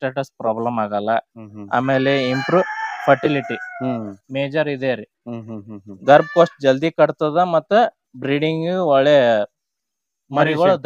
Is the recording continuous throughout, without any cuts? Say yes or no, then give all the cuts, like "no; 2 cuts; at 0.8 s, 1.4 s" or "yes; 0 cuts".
yes; 0 cuts